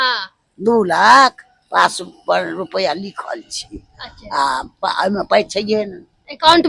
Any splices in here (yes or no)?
no